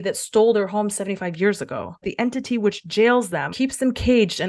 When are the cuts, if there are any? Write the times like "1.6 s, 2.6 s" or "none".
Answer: 2.0 s, 3.5 s

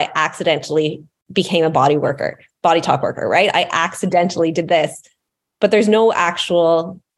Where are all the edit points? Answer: 1.1 s

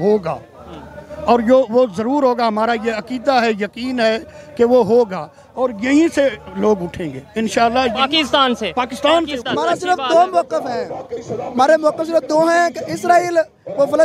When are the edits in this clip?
9.4 s

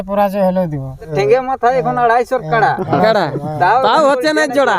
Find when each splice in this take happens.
1.1 s

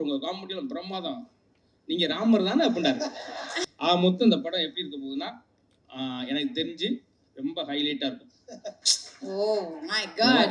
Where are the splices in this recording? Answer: 3.6 s

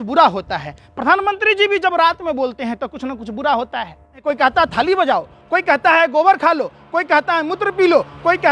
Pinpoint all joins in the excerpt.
4.2 s

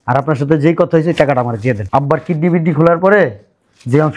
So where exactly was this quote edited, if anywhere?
1.8 s

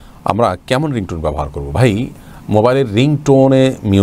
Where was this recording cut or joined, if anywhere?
none

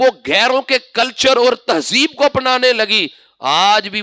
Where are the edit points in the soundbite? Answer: none

